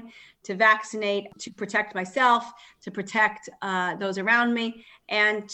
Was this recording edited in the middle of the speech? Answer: yes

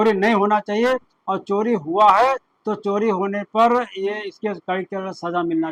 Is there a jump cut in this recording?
no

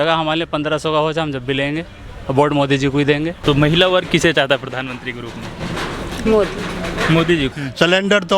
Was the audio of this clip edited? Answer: yes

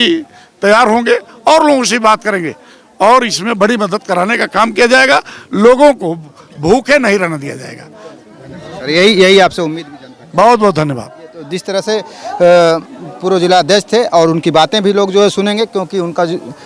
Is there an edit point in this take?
no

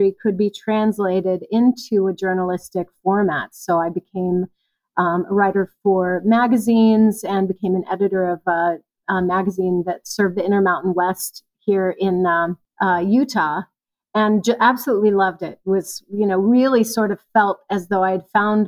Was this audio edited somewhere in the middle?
no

